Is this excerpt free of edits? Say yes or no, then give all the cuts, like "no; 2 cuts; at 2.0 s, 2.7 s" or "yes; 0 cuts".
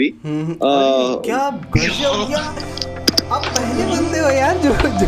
yes; 0 cuts